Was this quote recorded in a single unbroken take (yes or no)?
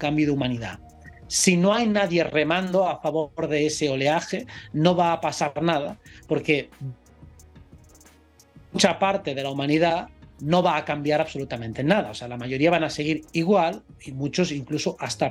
yes